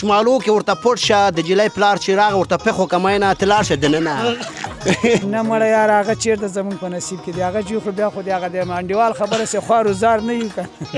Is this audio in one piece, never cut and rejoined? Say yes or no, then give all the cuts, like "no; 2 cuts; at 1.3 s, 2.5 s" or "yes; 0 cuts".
no; 1 cut; at 5.2 s